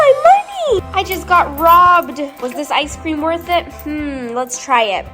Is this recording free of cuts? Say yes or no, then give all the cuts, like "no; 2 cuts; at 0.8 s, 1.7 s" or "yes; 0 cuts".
no; 2 cuts; at 0.8 s, 2.3 s